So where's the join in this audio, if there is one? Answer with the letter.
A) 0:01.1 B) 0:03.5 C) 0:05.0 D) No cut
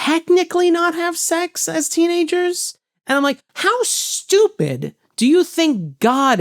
B